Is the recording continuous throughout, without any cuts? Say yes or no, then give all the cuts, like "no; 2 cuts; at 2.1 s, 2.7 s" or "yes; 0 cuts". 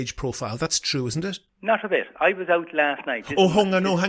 no; 1 cut; at 1.5 s